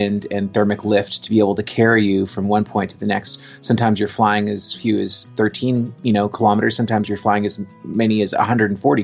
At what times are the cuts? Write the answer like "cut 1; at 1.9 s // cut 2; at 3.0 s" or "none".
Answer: none